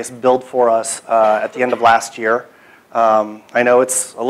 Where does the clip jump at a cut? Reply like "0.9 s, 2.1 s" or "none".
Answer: 1.1 s